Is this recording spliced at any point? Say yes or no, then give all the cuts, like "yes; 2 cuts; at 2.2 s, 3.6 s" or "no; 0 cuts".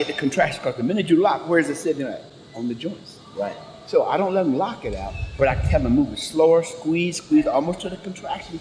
no; 0 cuts